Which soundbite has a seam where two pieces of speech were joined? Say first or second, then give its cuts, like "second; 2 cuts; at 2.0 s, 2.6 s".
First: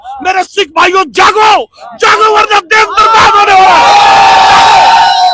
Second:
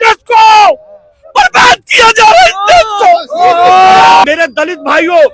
second; 1 cut; at 4.2 s